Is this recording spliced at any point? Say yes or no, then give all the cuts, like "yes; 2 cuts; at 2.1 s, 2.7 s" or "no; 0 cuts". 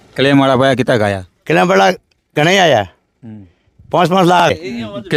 no; 0 cuts